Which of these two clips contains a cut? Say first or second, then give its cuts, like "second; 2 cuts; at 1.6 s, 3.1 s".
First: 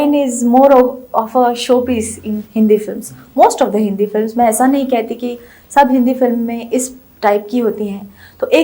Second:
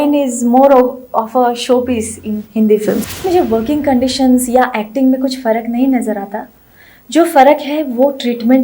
second; 1 cut; at 3.3 s